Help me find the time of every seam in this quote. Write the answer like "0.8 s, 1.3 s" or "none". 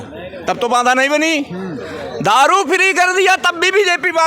none